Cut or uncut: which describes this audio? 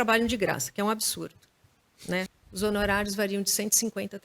cut